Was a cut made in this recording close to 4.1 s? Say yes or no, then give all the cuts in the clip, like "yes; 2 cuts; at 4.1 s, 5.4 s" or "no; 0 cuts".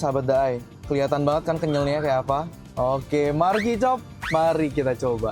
no; 0 cuts